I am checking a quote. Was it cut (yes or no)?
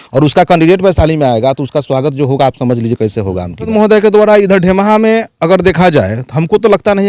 yes